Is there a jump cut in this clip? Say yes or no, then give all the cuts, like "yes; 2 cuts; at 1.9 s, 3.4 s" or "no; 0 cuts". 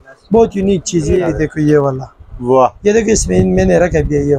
yes; 1 cut; at 1.2 s